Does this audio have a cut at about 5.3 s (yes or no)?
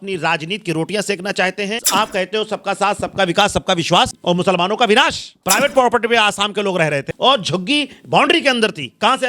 yes